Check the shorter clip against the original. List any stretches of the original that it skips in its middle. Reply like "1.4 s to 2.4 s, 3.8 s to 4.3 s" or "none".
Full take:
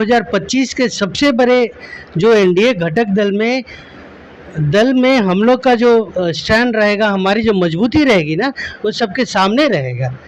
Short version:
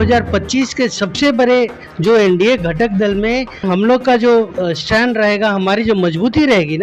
1.8 s to 2.0 s, 3.8 s to 5.2 s